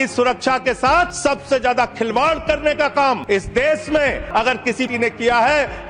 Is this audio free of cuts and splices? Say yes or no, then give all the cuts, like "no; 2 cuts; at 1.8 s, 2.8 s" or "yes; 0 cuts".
no; 3 cuts; at 1.1 s, 3.2 s, 4.6 s